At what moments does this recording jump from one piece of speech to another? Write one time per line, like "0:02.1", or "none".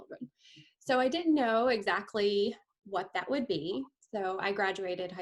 none